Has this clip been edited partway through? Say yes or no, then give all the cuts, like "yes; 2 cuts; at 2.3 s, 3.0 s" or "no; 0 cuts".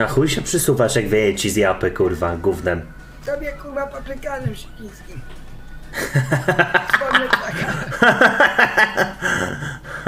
no; 0 cuts